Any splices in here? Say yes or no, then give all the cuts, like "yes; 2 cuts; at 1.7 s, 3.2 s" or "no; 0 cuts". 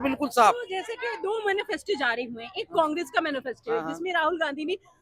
no; 0 cuts